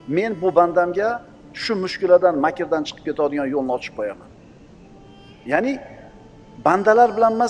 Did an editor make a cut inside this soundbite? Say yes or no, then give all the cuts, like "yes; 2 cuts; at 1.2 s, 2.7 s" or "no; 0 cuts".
no; 0 cuts